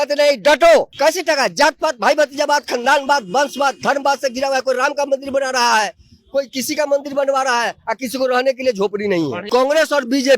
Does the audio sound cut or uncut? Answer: cut